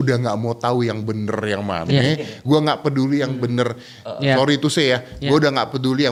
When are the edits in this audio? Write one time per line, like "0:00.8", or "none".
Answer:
none